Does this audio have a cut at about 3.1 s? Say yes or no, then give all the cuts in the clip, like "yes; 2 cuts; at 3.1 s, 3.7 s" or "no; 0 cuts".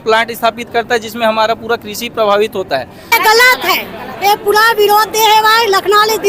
yes; 1 cut; at 3.1 s